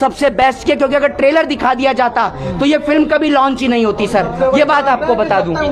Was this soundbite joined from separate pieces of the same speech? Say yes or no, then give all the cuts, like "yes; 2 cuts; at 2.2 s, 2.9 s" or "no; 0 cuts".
no; 0 cuts